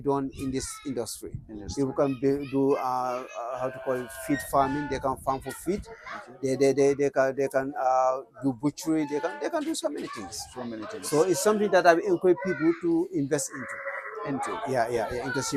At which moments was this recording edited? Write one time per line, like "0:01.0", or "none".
none